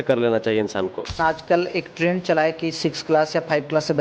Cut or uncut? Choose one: cut